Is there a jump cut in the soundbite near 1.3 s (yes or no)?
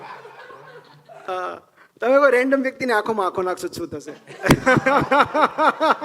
yes